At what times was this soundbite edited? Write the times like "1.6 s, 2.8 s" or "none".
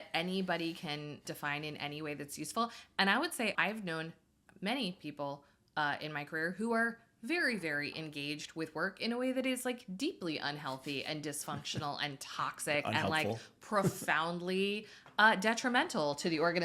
1.3 s, 3.5 s